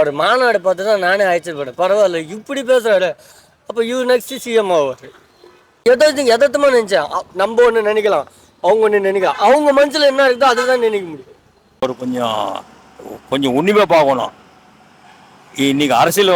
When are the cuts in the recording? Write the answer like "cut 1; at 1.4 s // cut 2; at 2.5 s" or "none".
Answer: cut 1; at 5.8 s // cut 2; at 11.8 s

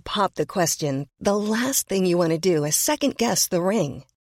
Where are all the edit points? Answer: none

